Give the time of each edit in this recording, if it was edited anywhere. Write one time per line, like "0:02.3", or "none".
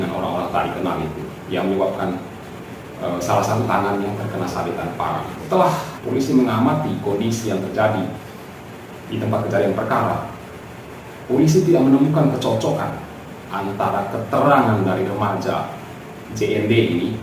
0:05.4
0:05.9